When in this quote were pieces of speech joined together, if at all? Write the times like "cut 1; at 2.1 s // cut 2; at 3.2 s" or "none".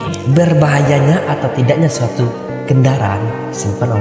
none